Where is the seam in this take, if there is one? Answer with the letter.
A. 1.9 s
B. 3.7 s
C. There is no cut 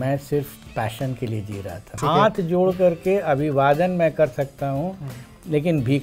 A